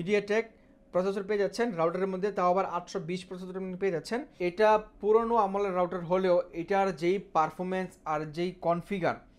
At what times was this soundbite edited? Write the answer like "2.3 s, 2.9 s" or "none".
4.3 s